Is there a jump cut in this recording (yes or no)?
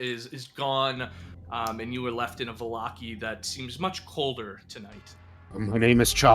yes